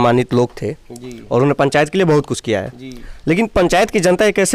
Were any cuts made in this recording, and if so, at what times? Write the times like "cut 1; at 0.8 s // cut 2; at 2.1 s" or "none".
none